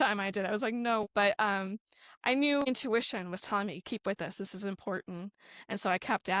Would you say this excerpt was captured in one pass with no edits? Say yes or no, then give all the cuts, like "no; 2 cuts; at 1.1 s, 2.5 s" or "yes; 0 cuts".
no; 2 cuts; at 1.1 s, 2.6 s